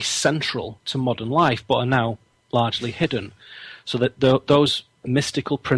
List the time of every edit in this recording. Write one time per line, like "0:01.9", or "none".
0:03.8

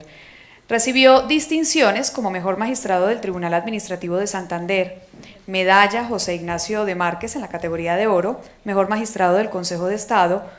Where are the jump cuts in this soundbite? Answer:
0:06.6

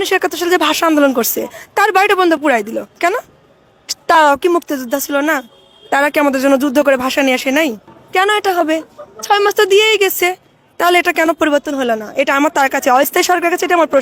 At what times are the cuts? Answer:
none

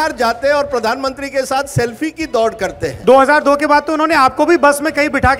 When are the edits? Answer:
0:02.9

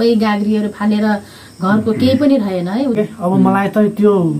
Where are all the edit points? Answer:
0:03.0

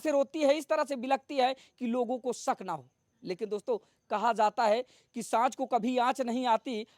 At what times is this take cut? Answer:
none

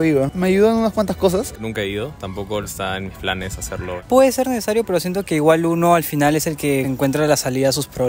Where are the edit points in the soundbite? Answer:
0:01.5
0:02.7
0:04.0
0:06.9

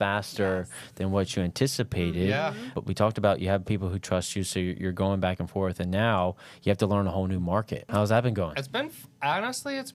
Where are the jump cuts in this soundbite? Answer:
0:02.7
0:07.8

